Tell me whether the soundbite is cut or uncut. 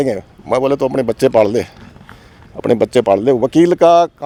uncut